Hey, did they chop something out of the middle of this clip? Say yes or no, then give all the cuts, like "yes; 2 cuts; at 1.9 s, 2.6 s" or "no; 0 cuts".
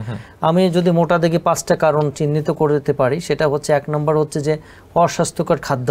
no; 0 cuts